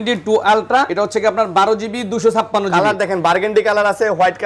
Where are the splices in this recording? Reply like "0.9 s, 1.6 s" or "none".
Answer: 0.9 s